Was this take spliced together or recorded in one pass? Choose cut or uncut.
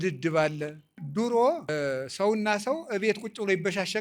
cut